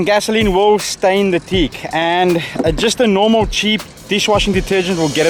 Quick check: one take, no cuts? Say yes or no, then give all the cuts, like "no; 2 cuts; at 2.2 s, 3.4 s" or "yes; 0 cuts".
yes; 0 cuts